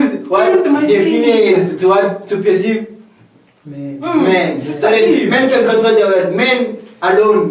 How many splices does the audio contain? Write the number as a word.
zero